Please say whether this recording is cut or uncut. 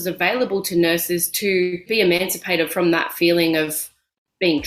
cut